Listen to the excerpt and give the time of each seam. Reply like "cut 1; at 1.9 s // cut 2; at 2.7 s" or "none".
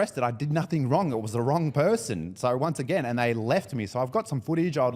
none